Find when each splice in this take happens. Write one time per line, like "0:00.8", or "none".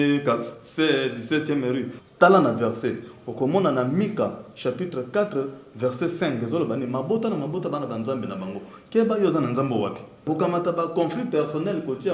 0:02.0
0:10.3